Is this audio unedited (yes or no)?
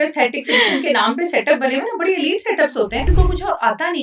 no